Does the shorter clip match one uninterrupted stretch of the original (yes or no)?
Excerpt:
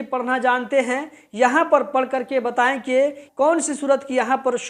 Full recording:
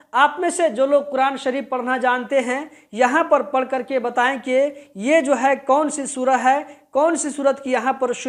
no